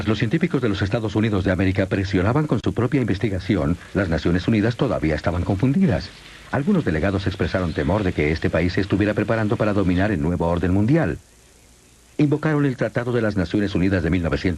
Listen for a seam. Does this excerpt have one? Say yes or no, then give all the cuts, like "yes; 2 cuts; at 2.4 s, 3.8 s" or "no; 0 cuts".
yes; 1 cut; at 1.3 s